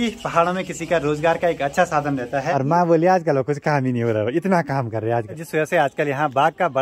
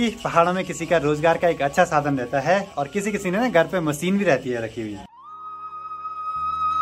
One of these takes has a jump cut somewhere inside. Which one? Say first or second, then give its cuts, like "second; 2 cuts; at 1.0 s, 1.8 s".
first; 2 cuts; at 2.5 s, 5.4 s